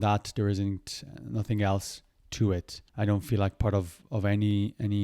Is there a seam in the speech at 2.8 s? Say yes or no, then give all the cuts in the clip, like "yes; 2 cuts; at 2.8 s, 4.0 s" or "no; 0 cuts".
yes; 1 cut; at 2.8 s